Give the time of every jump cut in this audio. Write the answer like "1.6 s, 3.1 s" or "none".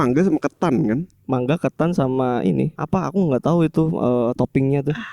2.8 s